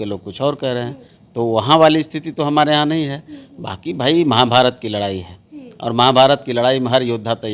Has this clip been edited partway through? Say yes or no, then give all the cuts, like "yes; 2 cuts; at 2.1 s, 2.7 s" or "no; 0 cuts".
no; 0 cuts